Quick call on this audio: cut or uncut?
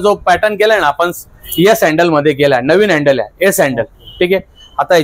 uncut